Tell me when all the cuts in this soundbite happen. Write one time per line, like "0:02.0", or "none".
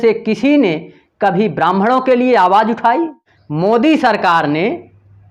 none

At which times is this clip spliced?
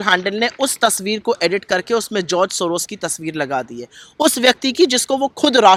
none

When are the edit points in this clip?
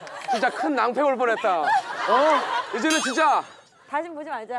none

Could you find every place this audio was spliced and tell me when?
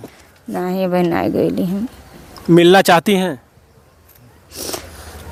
none

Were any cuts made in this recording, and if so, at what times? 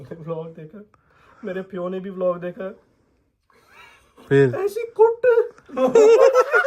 none

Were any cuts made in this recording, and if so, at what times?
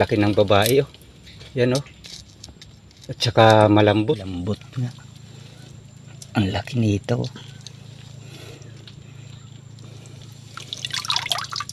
0:04.3

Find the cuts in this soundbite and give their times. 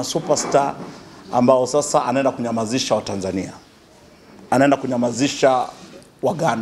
none

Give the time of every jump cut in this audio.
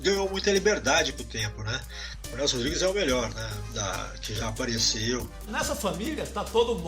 0:02.2
0:05.4

